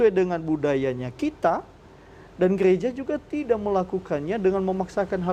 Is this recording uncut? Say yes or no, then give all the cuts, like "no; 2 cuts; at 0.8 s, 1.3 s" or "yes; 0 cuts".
yes; 0 cuts